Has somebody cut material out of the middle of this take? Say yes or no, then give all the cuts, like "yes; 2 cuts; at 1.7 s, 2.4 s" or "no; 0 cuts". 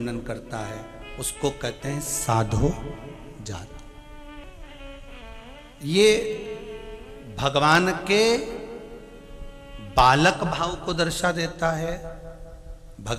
yes; 1 cut; at 4.4 s